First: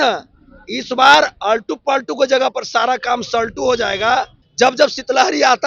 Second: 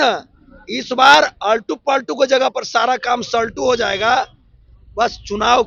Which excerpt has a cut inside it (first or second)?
first